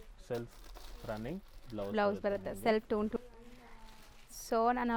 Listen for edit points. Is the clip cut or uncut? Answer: cut